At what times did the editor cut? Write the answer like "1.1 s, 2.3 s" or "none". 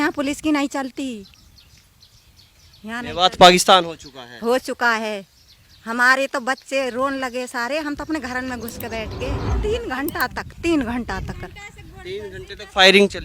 9.4 s